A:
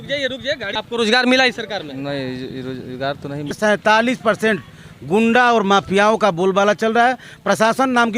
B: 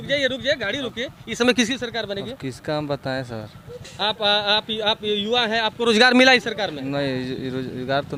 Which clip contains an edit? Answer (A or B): A